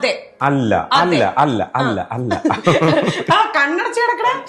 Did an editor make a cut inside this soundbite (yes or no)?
no